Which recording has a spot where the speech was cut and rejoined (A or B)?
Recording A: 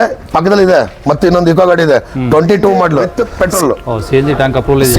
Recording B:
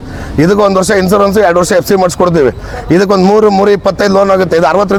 A